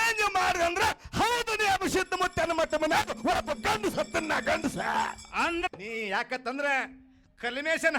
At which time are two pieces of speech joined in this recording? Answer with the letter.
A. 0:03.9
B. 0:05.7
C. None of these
B